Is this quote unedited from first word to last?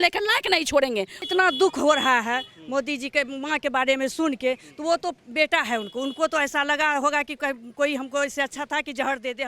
no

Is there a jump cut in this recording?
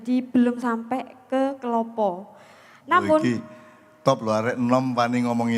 no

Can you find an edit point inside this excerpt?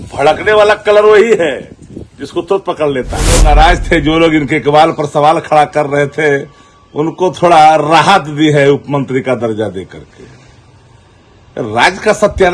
yes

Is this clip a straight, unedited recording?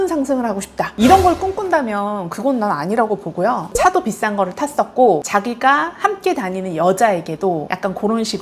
no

